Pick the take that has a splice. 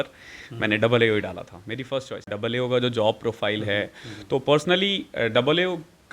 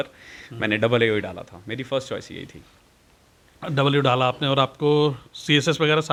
first; 1 cut; at 2.3 s

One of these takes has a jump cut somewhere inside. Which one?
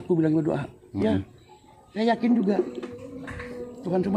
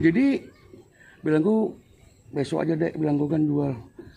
first; 1 cut; at 2.8 s

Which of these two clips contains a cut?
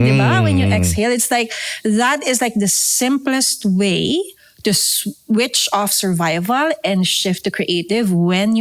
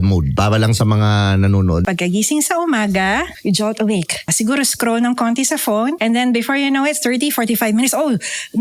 second; 4 cuts; at 1.8 s, 3.3 s, 4.3 s, 6.0 s

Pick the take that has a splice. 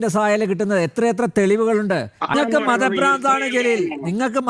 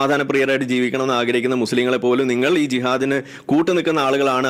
first; 1 cut; at 2.3 s

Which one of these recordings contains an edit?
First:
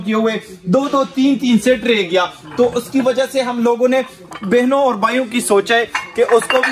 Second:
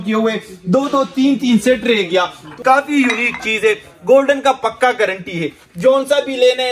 second; 1 cut; at 2.4 s

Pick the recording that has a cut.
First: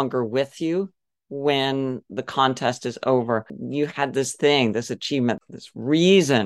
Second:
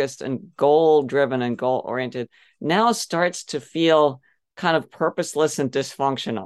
first; 2 cuts; at 3.6 s, 5.4 s

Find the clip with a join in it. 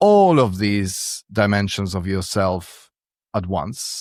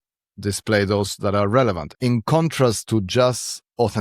second; 1 cut; at 1.9 s

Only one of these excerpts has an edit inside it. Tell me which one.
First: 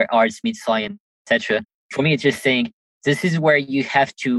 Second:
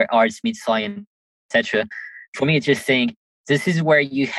first; 1 cut; at 1.5 s

